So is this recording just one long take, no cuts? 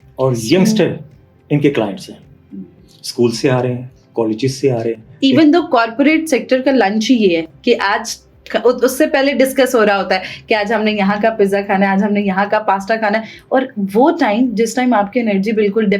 yes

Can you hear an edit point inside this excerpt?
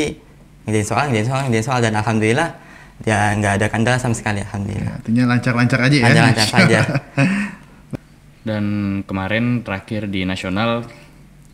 yes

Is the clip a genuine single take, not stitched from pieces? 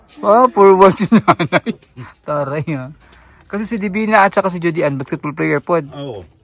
yes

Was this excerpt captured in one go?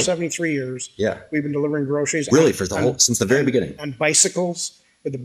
yes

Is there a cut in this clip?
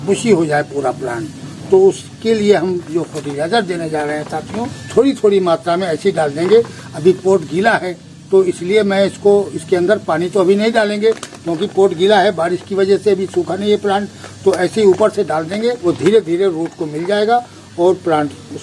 yes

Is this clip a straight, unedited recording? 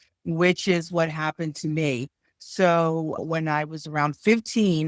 no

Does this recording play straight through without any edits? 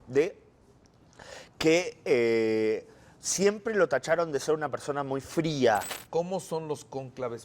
no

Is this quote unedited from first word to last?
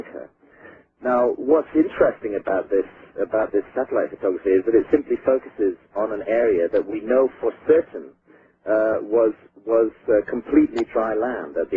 no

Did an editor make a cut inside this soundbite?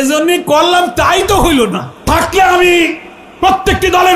yes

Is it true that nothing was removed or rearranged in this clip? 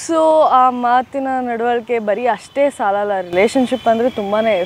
yes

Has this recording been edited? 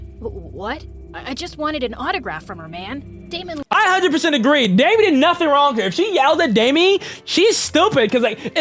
yes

